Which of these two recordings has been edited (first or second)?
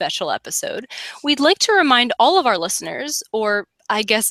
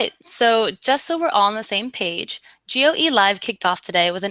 second